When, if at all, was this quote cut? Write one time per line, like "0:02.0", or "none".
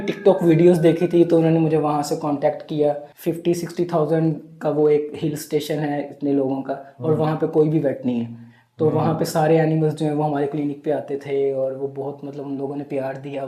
0:03.1